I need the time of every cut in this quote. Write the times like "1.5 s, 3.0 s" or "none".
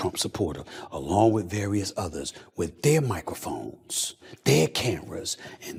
none